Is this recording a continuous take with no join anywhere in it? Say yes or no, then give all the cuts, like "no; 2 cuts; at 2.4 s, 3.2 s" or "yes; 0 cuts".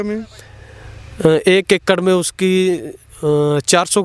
yes; 0 cuts